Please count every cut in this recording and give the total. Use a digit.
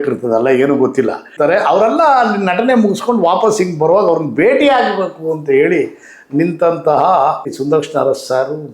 2